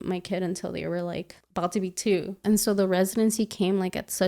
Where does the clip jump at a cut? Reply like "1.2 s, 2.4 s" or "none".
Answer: 1.4 s, 2.4 s